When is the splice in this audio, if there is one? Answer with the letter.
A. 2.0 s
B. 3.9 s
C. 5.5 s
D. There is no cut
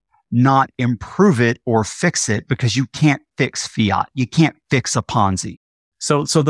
C